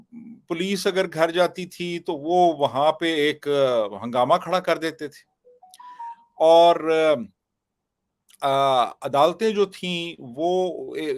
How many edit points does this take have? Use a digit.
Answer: 0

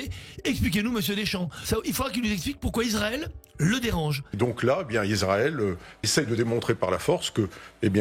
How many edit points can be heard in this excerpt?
2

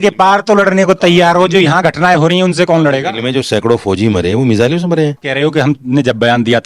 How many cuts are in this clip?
0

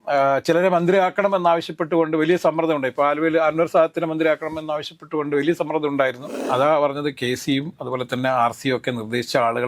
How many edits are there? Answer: 1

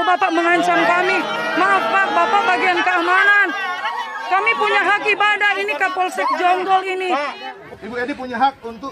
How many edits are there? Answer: 1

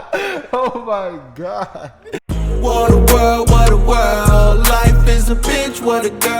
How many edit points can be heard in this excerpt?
1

